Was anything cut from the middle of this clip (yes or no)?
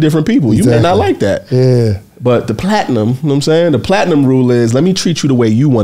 no